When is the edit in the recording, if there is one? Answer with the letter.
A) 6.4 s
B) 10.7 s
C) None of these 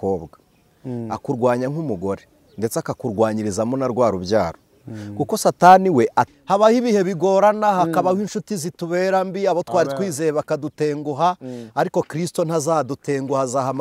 A